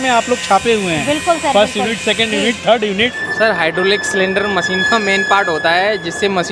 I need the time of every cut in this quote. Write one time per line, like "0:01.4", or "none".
0:03.2